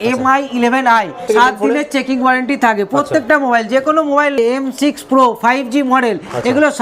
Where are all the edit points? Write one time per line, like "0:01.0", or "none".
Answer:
0:01.2
0:04.3